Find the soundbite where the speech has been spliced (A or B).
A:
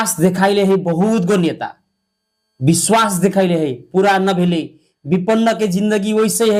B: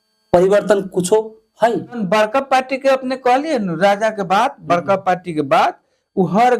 B